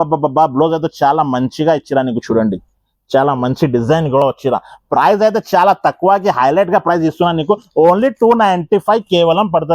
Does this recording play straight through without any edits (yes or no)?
yes